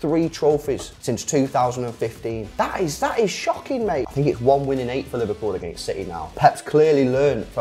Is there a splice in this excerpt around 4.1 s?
yes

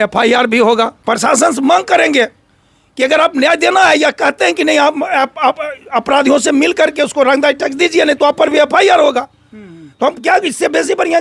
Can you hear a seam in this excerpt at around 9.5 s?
no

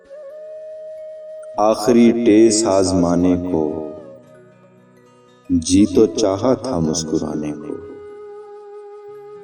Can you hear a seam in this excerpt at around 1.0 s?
yes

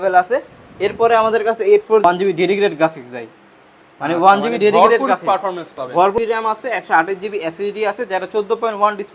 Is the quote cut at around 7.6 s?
no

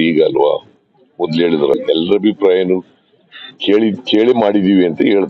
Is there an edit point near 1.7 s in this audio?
yes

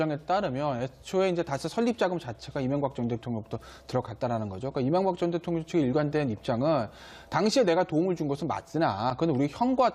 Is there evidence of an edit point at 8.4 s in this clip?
no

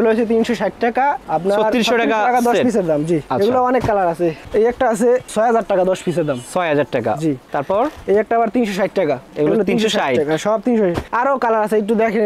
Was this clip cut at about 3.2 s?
no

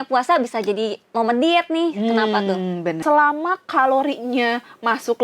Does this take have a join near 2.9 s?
yes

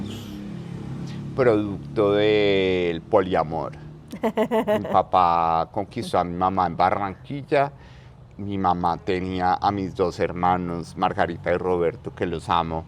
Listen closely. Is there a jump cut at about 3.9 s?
no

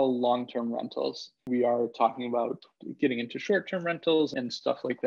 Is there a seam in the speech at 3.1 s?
no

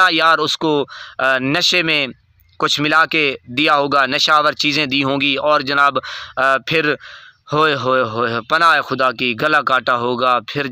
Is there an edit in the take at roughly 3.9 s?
no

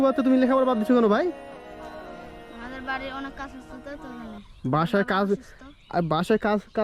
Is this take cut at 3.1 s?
no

